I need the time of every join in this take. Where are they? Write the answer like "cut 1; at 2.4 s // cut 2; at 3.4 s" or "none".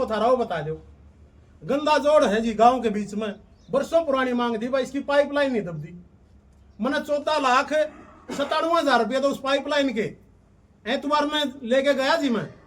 cut 1; at 9.8 s